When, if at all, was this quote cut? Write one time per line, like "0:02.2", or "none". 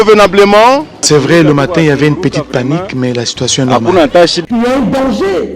0:01.0
0:04.4